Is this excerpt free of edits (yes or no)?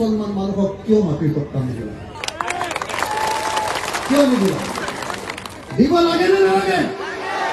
yes